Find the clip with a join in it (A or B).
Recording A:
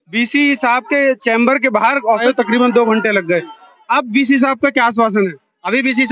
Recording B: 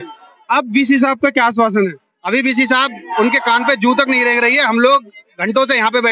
A